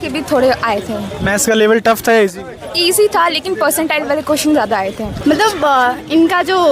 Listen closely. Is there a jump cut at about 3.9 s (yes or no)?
no